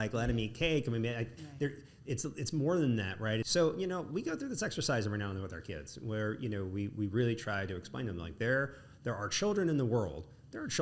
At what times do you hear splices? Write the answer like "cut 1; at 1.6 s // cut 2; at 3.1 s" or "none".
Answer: cut 1; at 3.4 s